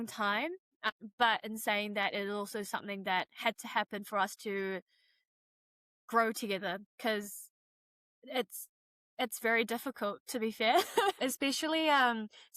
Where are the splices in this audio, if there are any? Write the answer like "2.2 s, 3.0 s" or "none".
11.2 s